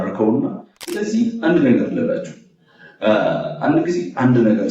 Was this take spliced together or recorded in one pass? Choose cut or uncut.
cut